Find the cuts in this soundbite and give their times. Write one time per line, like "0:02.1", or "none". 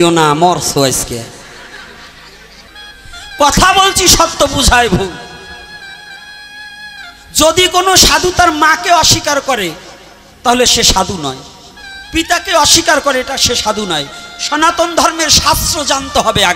0:02.7